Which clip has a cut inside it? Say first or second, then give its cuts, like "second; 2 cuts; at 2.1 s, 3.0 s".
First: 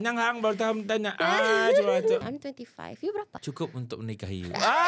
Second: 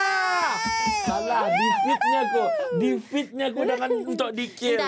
first; 2 cuts; at 2.2 s, 3.3 s